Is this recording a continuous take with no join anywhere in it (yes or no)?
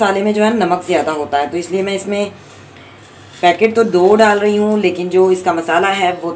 yes